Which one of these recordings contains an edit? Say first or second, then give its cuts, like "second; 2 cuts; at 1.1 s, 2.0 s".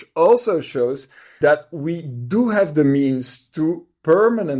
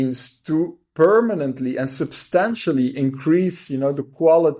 first; 1 cut; at 1.3 s